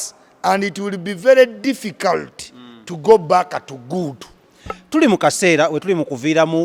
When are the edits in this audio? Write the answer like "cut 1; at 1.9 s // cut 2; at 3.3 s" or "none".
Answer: none

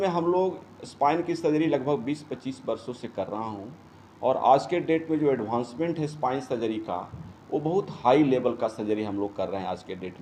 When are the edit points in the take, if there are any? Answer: none

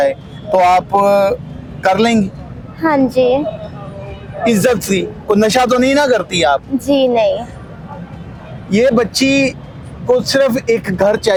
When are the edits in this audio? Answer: none

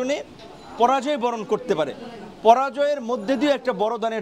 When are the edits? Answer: none

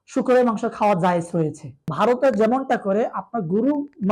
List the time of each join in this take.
cut 1; at 1.9 s

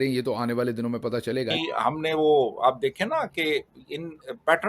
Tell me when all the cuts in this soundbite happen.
cut 1; at 1.5 s

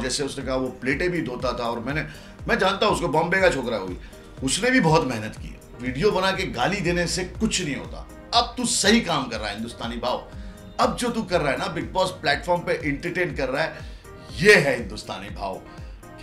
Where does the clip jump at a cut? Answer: cut 1; at 5.8 s

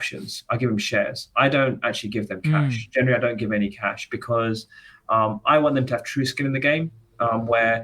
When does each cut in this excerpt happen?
none

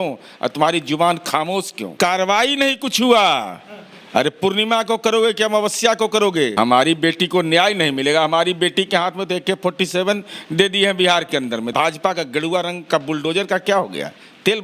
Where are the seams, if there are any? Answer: cut 1; at 1.9 s // cut 2; at 6.5 s // cut 3; at 11.7 s

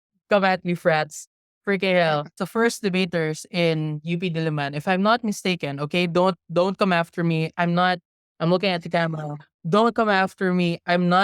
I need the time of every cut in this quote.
cut 1; at 2.3 s

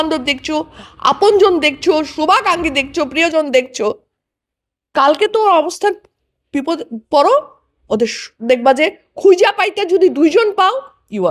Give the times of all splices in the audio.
none

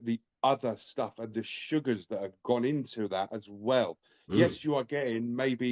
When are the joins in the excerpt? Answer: none

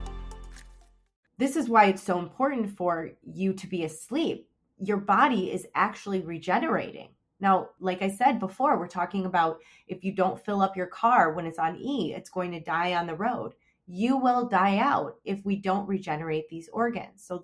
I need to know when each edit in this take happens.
cut 1; at 1.2 s // cut 2; at 7.7 s

